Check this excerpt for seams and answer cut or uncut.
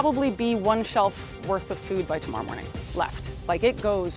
uncut